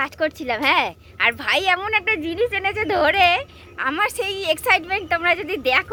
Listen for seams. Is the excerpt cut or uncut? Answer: uncut